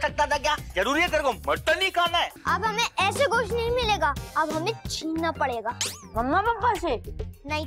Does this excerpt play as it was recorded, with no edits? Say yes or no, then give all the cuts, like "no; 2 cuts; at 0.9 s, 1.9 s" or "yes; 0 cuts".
no; 1 cut; at 2.4 s